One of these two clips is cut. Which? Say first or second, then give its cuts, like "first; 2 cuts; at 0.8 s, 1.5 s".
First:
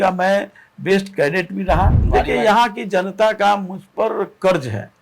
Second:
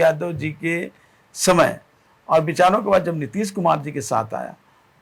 first; 1 cut; at 2.0 s